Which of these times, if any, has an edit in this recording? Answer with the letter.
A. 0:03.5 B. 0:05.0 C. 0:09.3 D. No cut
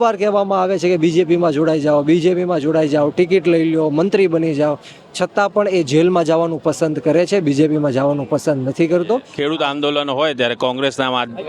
C